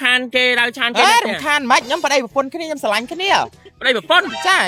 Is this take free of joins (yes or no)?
yes